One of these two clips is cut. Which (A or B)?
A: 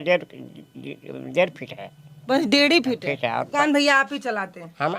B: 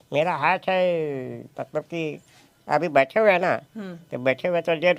A